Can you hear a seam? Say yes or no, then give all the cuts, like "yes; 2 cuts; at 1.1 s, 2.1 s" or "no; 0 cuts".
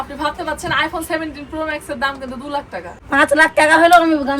yes; 1 cut; at 2.9 s